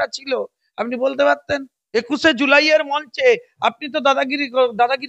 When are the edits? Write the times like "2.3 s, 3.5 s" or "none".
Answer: 1.8 s

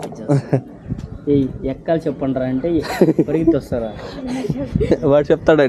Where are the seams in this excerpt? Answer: none

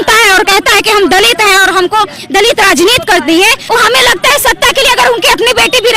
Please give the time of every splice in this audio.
3.6 s

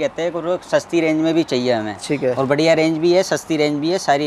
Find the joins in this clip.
none

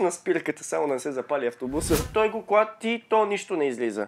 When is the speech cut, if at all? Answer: 2.0 s

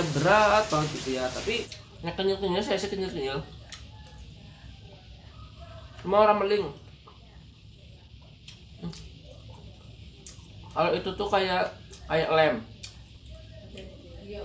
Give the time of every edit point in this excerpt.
1.8 s

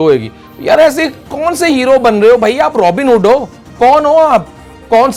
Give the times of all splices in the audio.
none

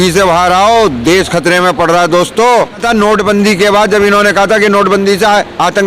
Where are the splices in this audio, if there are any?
2.8 s

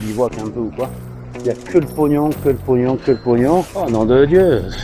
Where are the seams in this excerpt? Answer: 3.8 s

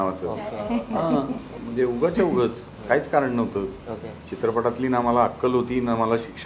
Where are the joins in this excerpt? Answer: 1.5 s

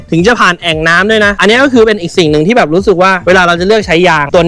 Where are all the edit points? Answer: 1.4 s

